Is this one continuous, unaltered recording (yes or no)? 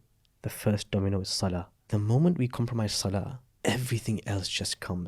no